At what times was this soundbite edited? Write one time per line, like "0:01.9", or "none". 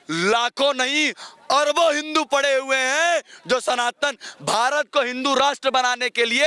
none